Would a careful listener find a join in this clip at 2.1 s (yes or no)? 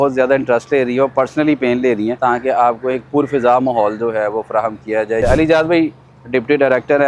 yes